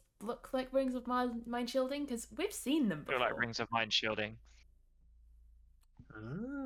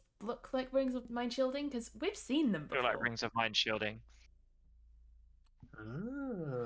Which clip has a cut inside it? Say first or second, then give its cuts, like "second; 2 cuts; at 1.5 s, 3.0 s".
second; 1 cut; at 1.1 s